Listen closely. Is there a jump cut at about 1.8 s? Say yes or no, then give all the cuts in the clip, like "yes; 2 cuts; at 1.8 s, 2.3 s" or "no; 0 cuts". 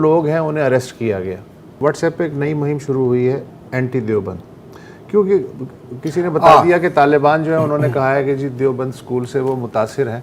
yes; 1 cut; at 1.8 s